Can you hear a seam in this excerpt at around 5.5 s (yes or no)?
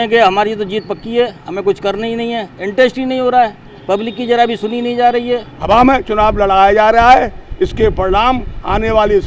yes